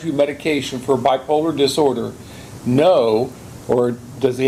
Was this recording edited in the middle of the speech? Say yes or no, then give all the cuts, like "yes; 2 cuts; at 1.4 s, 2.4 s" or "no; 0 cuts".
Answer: no; 0 cuts